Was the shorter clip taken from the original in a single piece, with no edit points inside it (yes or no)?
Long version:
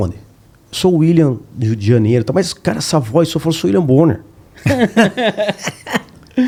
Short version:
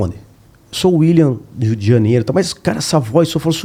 yes